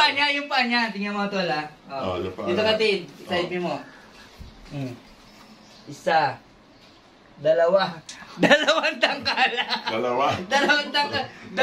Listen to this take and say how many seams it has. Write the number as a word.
zero